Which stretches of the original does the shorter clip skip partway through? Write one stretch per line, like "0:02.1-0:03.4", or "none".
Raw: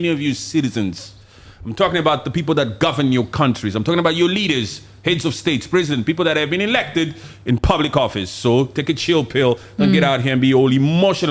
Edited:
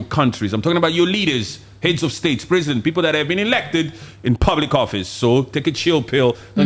none